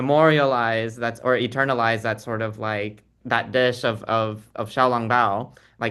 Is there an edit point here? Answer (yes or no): no